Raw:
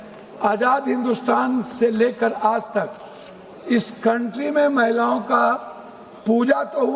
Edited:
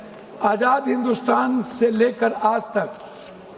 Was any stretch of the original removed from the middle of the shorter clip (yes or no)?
no